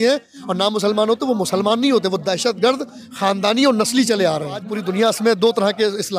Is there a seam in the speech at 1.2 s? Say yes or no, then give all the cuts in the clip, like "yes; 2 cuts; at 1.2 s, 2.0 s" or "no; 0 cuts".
no; 1 cut; at 4.8 s